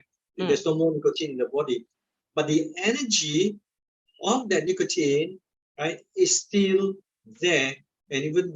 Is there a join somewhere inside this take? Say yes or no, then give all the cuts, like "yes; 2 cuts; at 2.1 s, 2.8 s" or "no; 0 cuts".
no; 0 cuts